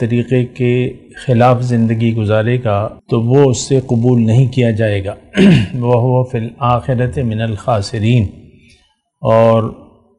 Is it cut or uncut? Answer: cut